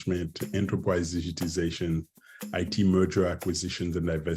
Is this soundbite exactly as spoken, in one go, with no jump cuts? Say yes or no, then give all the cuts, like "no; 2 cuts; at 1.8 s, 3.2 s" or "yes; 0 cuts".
yes; 0 cuts